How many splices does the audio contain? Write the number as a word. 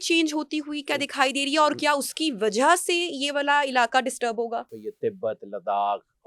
one